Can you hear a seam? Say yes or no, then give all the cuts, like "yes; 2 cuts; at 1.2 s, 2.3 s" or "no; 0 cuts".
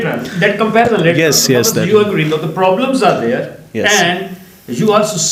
no; 0 cuts